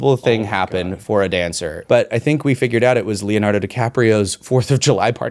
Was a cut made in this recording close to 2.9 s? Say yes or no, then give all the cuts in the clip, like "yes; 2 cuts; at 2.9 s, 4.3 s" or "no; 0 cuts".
no; 1 cut; at 1.7 s